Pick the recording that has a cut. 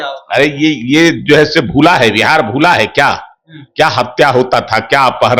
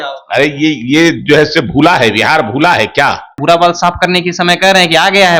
second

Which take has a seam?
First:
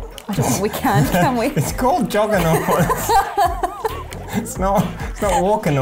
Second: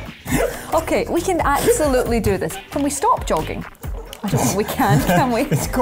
second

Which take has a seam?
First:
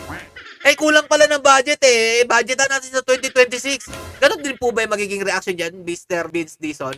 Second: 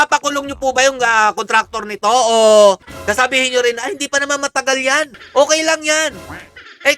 second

